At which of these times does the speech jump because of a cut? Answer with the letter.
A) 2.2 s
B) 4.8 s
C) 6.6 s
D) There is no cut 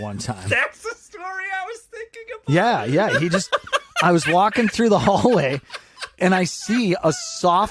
D